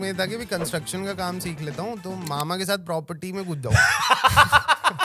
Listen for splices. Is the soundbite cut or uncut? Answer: uncut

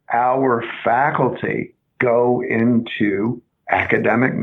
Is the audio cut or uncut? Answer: cut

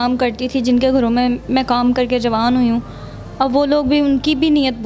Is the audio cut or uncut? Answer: uncut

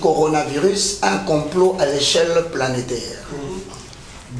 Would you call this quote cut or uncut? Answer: uncut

